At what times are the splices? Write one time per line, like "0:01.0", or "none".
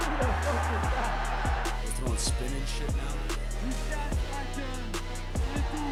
none